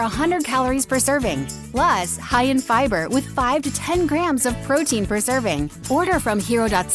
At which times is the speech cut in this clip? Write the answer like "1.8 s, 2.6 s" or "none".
1.6 s, 5.8 s